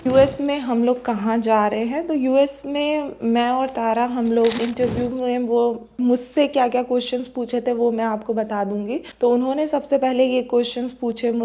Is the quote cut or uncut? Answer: cut